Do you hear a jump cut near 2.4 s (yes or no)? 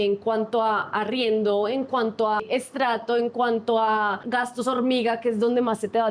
yes